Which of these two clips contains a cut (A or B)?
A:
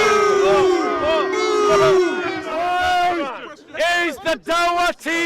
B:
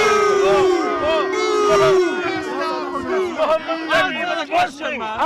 A